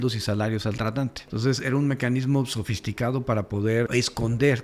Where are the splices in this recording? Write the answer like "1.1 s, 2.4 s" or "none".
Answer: 1.2 s, 3.9 s